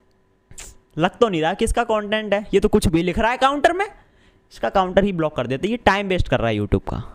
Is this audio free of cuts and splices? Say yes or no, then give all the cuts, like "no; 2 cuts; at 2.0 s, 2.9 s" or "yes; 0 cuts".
yes; 0 cuts